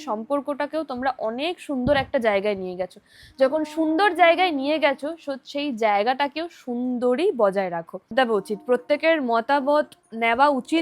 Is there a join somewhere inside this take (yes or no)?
yes